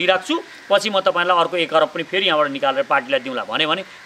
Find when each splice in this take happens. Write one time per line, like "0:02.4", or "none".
none